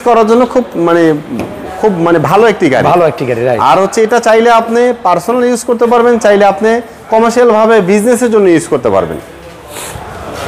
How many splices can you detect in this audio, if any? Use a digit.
0